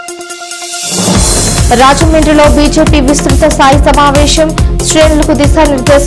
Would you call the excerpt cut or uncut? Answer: uncut